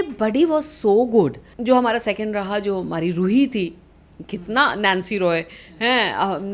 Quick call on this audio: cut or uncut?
cut